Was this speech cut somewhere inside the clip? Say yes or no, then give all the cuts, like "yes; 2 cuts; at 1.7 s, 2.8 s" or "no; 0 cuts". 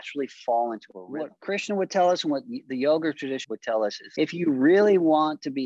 yes; 2 cuts; at 1.0 s, 4.0 s